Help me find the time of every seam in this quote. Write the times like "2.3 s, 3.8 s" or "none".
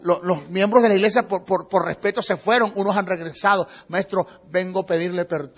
1.9 s